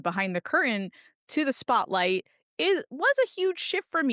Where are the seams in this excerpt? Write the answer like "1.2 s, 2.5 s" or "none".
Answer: none